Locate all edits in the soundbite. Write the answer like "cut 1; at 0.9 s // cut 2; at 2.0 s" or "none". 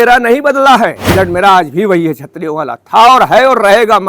cut 1; at 1.0 s